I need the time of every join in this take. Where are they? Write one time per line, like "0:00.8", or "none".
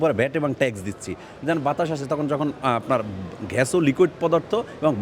none